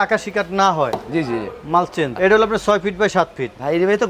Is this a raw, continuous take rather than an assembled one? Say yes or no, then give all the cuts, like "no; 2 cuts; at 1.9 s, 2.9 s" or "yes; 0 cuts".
no; 1 cut; at 2.1 s